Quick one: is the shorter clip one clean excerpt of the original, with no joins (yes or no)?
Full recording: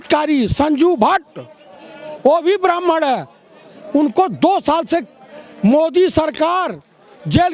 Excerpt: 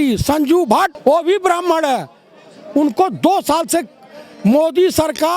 no